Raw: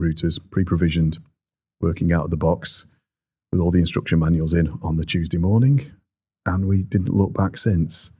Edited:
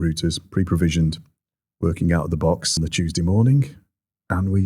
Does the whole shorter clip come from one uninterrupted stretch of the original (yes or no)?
no